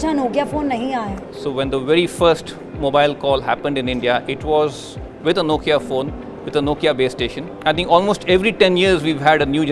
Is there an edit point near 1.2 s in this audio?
yes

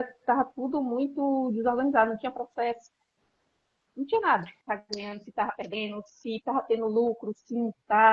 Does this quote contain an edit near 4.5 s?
yes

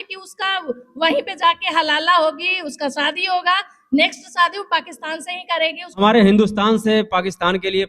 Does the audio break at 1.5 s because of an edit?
no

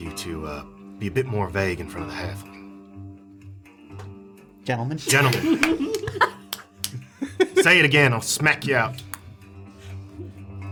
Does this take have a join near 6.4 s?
no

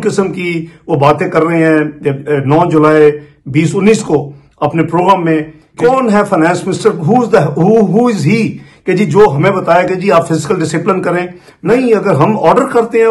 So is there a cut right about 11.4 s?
yes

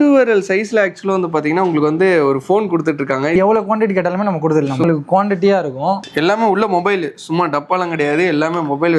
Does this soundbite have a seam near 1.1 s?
no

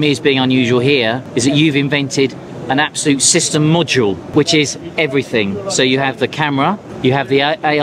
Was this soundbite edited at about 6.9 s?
yes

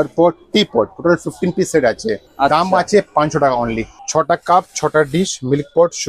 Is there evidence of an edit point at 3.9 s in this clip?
yes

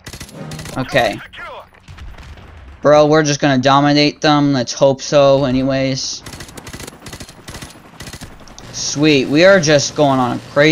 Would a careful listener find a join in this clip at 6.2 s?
yes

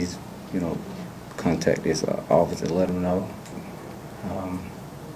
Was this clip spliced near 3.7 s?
yes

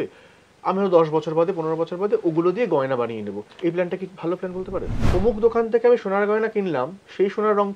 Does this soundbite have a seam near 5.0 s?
yes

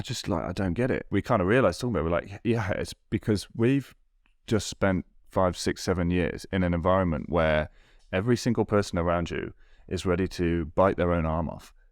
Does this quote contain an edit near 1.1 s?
yes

